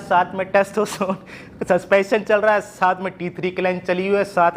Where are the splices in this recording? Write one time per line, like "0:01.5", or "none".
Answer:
none